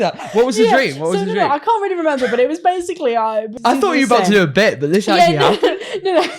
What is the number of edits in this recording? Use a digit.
1